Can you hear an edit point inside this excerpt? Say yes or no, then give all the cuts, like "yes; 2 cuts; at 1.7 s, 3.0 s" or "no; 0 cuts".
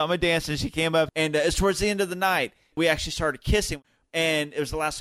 yes; 3 cuts; at 1.1 s, 2.7 s, 3.8 s